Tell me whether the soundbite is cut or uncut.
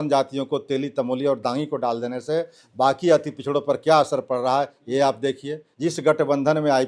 cut